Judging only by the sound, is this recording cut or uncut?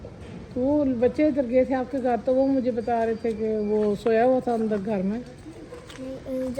uncut